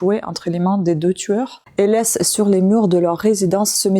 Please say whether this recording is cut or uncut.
cut